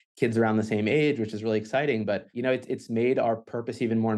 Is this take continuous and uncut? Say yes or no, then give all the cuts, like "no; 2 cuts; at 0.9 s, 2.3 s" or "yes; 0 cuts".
no; 1 cut; at 2.3 s